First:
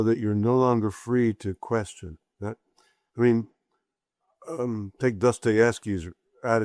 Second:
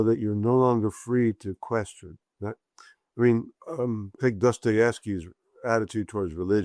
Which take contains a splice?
second; 1 cut; at 3.6 s

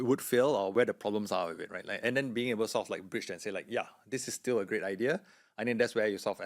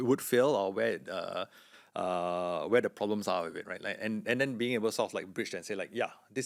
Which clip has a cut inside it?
first; 2 cuts; at 0.7 s, 2.0 s

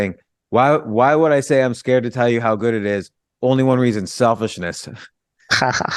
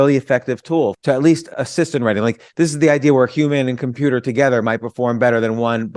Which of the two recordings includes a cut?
second; 2 cuts; at 1.0 s, 1.5 s

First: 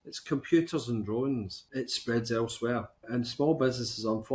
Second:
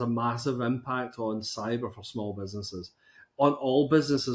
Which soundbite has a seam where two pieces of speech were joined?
first; 2 cuts; at 1.6 s, 3.0 s

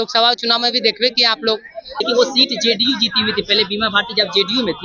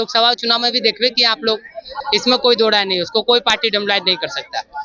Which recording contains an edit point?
first; 1 cut; at 1.8 s

